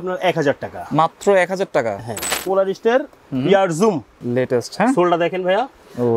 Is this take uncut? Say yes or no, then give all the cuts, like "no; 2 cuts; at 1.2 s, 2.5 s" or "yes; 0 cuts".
no; 2 cuts; at 2.4 s, 4.2 s